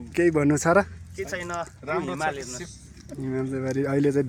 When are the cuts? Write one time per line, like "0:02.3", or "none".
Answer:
none